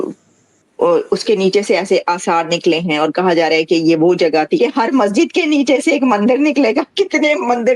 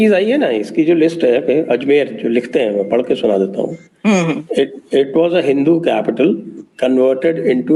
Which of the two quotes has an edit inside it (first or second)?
first